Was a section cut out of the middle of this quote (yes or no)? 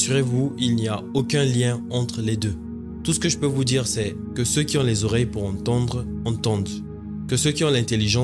no